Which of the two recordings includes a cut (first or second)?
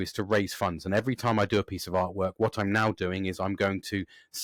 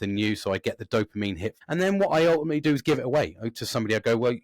second